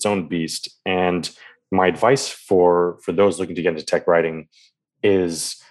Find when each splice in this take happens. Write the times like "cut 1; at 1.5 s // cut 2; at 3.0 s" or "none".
none